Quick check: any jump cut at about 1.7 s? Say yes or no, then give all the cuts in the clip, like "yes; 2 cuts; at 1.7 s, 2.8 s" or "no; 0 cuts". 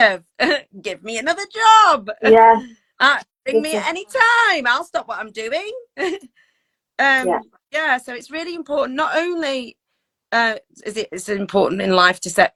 no; 0 cuts